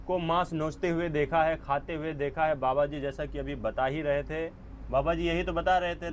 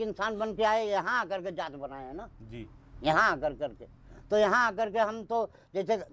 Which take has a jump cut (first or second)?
first